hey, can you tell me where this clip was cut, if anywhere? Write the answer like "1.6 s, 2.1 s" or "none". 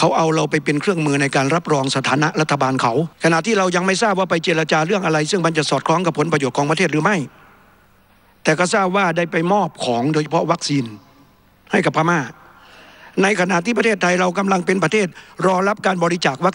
3.1 s